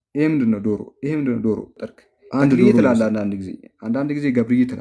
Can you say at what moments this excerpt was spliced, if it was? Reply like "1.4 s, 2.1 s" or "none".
2.8 s

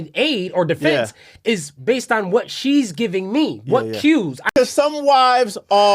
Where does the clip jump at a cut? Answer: 4.5 s

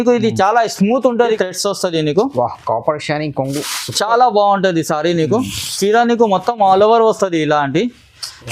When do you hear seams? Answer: 1.4 s

